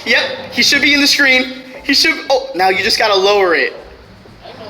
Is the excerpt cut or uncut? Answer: uncut